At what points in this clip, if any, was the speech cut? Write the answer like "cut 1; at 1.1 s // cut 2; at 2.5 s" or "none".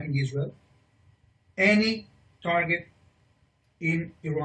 none